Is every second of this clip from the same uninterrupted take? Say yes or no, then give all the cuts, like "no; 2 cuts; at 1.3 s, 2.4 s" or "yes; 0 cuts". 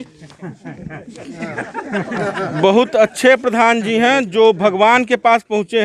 yes; 0 cuts